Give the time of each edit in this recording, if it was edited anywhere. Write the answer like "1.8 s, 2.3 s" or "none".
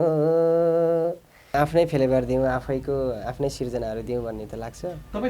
1.6 s